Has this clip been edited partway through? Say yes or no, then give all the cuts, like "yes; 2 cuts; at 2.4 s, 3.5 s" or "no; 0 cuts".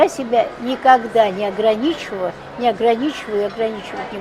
no; 0 cuts